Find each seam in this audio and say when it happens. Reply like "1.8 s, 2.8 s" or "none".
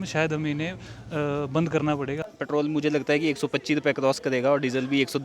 2.2 s